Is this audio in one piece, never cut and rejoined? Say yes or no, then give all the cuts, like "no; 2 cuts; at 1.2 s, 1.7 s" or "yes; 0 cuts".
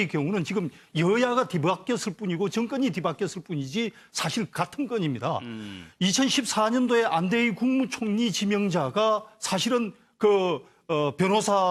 yes; 0 cuts